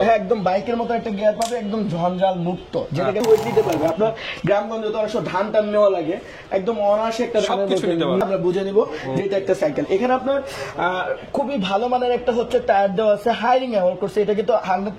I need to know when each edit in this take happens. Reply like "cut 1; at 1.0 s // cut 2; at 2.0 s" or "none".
cut 1; at 3.2 s // cut 2; at 8.2 s